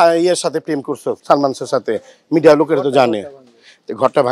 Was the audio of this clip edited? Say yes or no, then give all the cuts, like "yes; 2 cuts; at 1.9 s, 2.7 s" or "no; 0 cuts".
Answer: yes; 1 cut; at 1.2 s